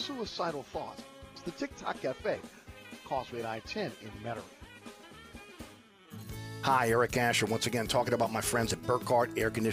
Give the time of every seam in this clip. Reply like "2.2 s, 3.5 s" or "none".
5.9 s